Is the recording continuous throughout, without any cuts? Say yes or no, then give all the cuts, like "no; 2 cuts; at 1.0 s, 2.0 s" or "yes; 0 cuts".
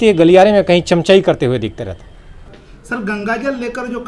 yes; 0 cuts